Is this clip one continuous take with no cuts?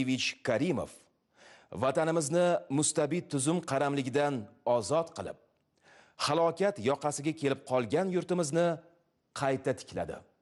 yes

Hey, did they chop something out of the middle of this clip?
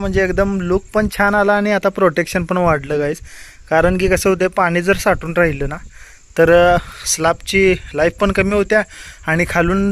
no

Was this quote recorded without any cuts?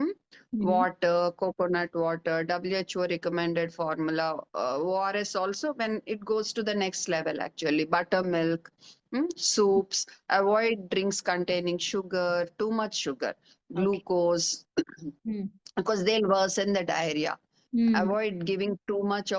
yes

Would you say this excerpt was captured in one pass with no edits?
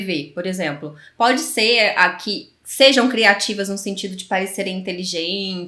yes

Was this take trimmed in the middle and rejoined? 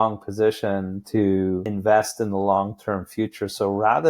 yes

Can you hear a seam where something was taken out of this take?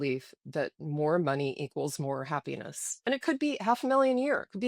yes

